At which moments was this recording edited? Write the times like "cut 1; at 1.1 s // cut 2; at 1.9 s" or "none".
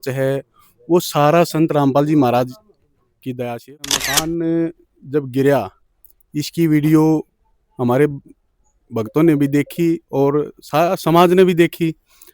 cut 1; at 4.0 s